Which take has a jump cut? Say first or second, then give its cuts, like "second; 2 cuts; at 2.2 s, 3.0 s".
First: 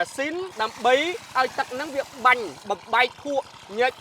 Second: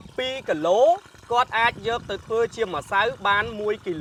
first; 1 cut; at 1.3 s